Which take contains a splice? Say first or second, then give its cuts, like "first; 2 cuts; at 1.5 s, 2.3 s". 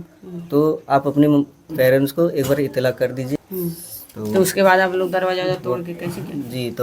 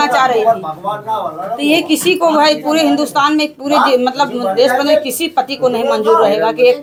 first; 1 cut; at 3.4 s